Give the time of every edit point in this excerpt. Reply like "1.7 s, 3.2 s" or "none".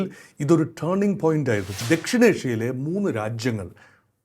1.8 s